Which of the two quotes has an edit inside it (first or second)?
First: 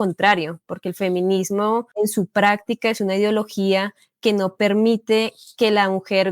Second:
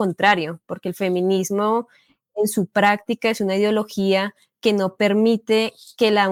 first